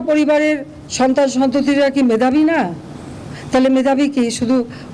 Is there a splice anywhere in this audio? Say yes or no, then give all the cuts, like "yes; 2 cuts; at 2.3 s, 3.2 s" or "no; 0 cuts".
no; 0 cuts